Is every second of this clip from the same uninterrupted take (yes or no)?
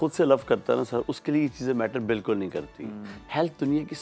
yes